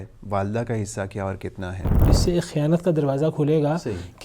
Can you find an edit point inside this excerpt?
yes; 1 cut; at 1.9 s

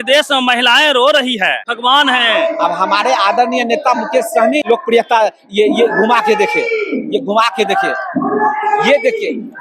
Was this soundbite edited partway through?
yes; 2 cuts; at 1.7 s, 4.7 s

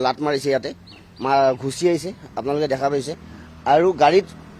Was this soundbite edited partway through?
no; 0 cuts

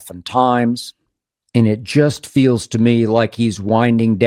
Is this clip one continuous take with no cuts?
yes; 0 cuts

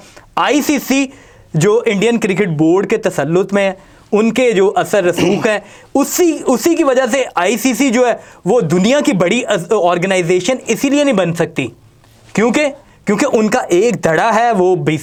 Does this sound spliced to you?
no; 0 cuts

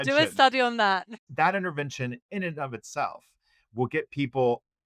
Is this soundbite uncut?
no; 1 cut; at 1.2 s

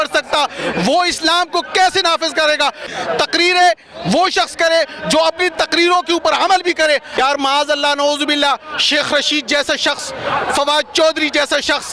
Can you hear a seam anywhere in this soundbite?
yes; 2 cuts; at 2.9 s, 7.1 s

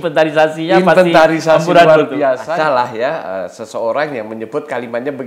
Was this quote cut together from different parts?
yes; 1 cut; at 2.4 s

